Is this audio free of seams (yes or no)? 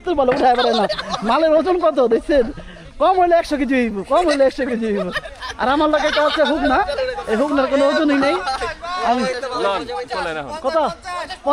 yes